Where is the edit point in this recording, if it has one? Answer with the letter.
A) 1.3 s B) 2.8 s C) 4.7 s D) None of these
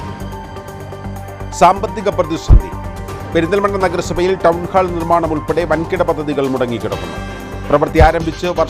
A